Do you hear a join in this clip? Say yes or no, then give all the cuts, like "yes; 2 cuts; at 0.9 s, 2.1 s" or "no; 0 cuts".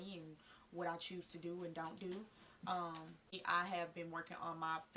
yes; 1 cut; at 3.4 s